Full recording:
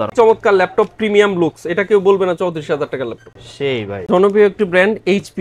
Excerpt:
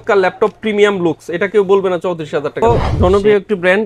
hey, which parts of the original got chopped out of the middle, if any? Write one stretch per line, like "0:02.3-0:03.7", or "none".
0:03.2-0:04.0